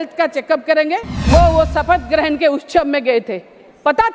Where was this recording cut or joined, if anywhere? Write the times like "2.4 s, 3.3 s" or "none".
1.1 s